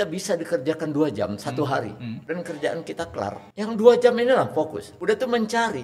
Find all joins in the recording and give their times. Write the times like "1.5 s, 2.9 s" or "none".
2.1 s, 3.4 s, 4.9 s